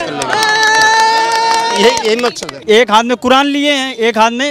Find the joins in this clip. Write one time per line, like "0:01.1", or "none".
0:02.5